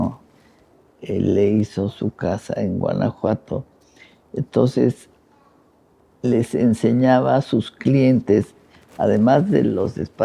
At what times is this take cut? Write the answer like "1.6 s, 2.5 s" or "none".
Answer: none